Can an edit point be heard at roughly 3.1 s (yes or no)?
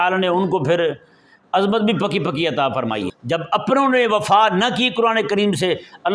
yes